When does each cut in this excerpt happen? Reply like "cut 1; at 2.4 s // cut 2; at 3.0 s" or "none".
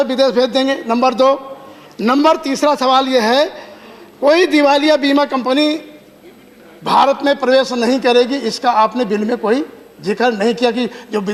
none